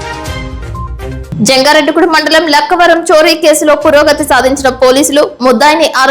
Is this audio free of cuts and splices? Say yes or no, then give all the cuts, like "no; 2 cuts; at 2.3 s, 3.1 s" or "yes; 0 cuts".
no; 1 cut; at 1.2 s